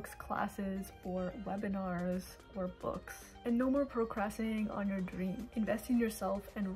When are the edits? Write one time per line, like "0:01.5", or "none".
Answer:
0:05.4